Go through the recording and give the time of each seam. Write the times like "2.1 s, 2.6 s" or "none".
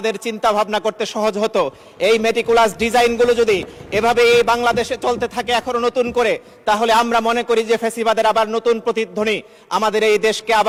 none